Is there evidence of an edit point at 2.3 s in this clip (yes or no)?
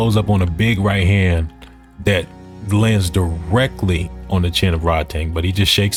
no